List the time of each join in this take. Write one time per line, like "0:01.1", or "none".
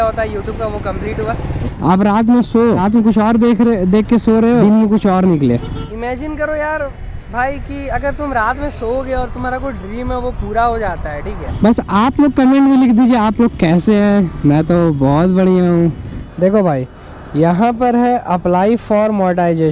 0:01.7
0:02.8
0:04.6
0:05.9
0:11.4
0:16.1